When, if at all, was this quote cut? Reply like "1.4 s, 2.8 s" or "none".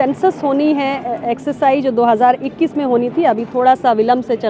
none